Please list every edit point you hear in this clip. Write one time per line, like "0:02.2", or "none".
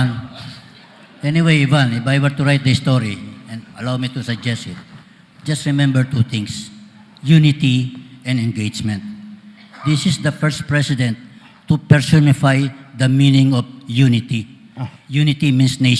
none

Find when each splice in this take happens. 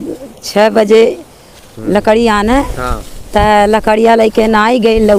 none

